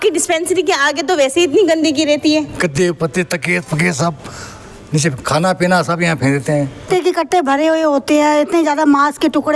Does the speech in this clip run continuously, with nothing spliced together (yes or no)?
no